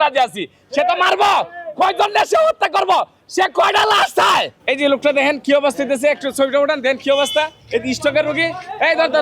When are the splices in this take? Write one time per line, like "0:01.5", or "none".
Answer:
0:04.5

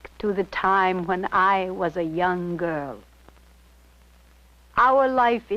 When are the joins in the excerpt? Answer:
0:01.5

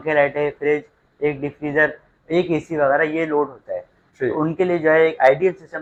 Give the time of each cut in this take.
none

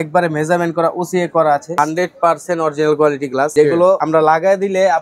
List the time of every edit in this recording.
0:01.8
0:03.8

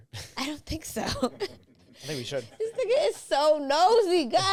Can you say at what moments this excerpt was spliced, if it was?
none

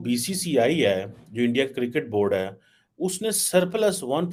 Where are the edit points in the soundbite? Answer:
none

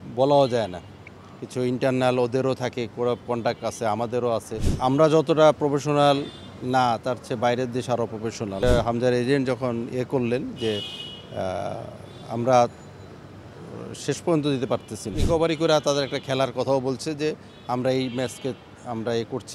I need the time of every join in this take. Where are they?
0:04.6
0:08.6
0:15.1

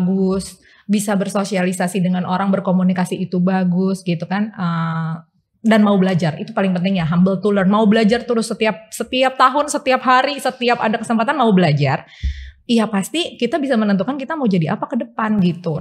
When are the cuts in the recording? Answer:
none

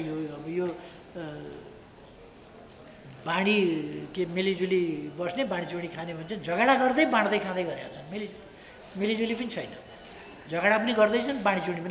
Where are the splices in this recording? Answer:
none

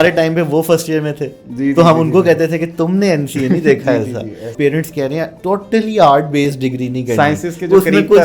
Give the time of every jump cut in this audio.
0:04.5
0:05.3

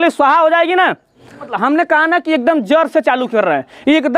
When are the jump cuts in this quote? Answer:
0:01.5

